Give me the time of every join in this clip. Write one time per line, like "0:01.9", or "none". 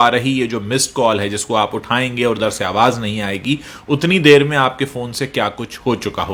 none